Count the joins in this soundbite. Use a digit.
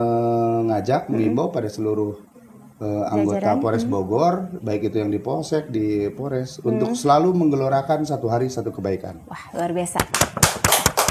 0